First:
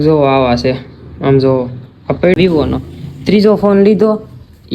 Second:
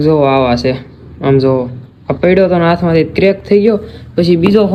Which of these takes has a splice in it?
first; 1 cut; at 2.4 s

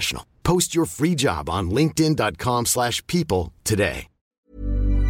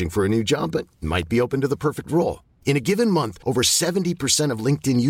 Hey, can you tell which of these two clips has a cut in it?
first; 1 cut; at 4.1 s

